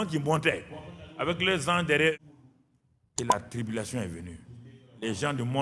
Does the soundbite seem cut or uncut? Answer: cut